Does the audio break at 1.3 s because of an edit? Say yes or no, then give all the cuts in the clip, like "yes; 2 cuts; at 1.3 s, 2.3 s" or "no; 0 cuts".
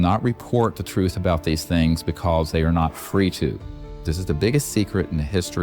no; 1 cut; at 3.8 s